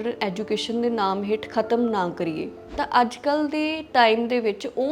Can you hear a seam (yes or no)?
yes